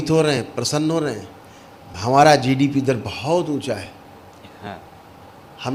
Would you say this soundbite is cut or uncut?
uncut